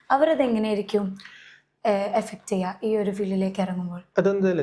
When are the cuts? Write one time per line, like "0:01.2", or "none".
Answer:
none